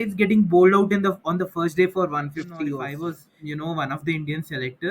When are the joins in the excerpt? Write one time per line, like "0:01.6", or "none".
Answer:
0:02.9